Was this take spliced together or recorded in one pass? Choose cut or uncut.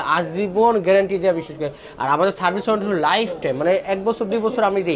uncut